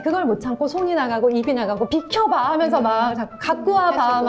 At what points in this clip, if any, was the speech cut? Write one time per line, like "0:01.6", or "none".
0:01.9